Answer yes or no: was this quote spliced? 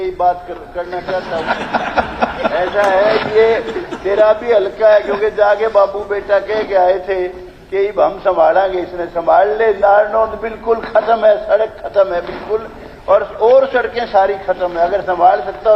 no